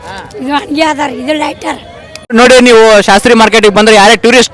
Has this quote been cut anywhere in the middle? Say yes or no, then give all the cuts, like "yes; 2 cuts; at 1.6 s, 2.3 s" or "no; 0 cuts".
yes; 1 cut; at 2.3 s